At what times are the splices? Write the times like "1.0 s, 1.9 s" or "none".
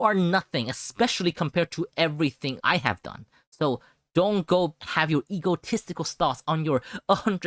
2.6 s, 4.8 s